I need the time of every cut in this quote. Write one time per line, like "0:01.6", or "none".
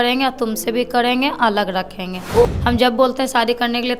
0:02.5